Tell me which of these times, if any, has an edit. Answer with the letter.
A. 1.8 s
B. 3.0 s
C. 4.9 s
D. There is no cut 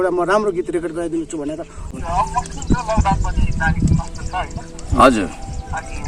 A